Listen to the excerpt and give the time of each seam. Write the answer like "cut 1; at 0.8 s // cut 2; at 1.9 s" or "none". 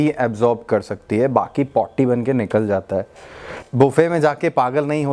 cut 1; at 3.6 s